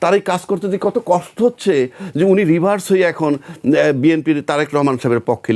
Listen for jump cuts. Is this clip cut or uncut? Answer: uncut